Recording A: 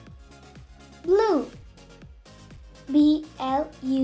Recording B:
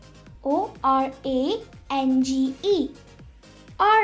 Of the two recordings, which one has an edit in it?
A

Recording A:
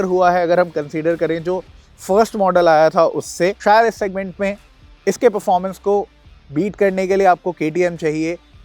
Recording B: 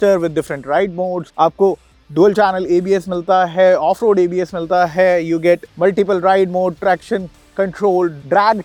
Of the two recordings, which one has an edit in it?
A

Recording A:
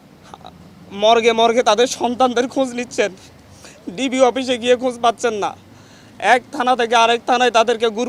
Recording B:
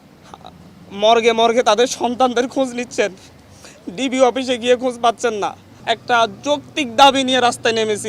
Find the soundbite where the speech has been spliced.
B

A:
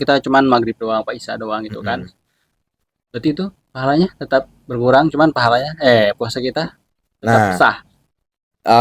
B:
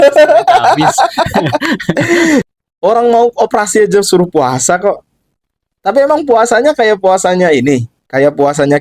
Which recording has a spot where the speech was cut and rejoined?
B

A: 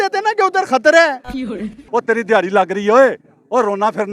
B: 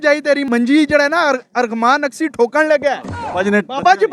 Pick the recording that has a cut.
A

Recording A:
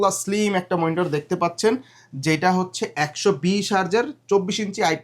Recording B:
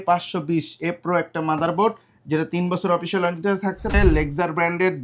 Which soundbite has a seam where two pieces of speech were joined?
B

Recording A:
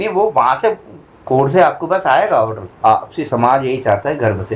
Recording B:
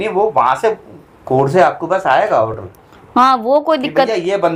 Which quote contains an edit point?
A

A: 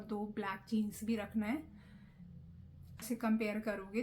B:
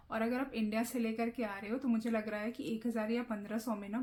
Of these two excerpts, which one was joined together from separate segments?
A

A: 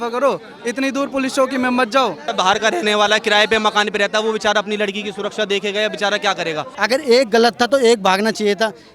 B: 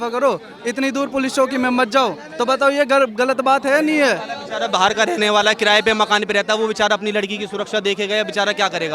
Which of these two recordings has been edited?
A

